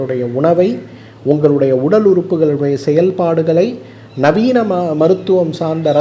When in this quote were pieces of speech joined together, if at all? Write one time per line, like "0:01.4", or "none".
none